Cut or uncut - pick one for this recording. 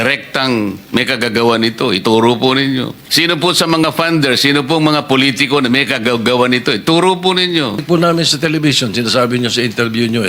cut